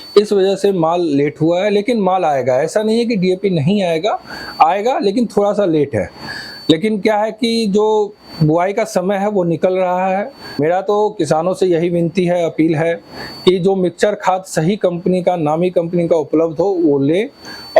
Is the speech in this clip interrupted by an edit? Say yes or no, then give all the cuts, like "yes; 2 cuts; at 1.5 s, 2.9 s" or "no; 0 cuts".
yes; 1 cut; at 10.6 s